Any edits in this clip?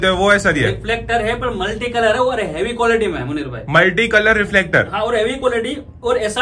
no; 0 cuts

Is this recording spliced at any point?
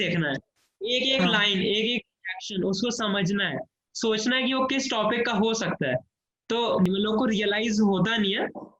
yes; 1 cut; at 6.9 s

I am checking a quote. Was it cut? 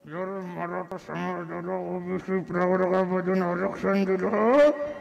yes; 1 cut; at 0.9 s

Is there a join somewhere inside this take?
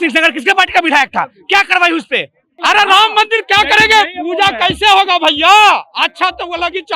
yes; 1 cut; at 2.6 s

